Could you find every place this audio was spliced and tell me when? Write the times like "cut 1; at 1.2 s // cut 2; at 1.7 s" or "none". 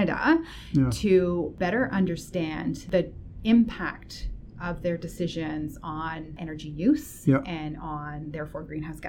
cut 1; at 1.5 s // cut 2; at 2.8 s // cut 3; at 6.4 s